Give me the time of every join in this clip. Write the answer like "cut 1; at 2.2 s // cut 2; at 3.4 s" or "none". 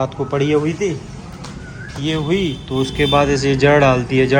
none